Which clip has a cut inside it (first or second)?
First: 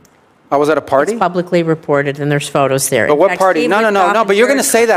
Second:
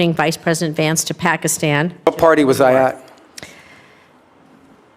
second